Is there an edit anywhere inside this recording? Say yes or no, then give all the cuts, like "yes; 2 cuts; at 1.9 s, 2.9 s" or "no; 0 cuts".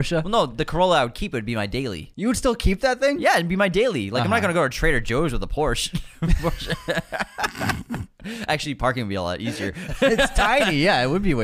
yes; 1 cut; at 2.0 s